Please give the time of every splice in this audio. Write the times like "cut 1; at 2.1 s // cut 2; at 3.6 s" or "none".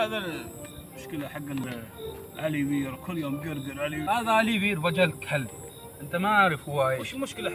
cut 1; at 1.6 s // cut 2; at 4.0 s